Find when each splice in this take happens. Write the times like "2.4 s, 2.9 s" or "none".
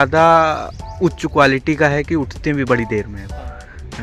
none